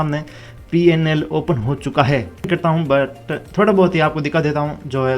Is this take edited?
yes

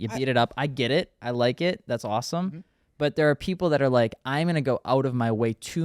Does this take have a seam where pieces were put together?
no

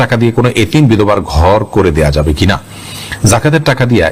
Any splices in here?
no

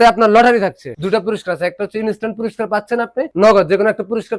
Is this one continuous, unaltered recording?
no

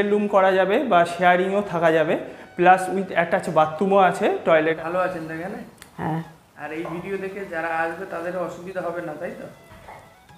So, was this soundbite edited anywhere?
yes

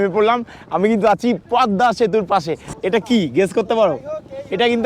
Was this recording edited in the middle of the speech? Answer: yes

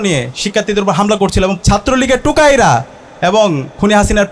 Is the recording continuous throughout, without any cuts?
no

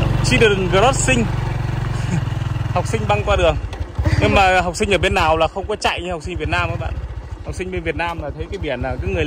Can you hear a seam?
no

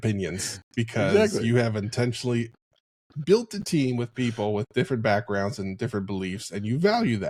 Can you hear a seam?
no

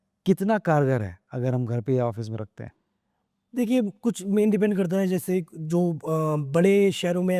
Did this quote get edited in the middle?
no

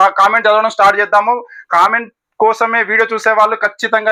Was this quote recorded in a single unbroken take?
yes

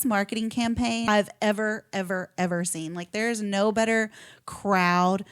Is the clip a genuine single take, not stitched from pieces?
no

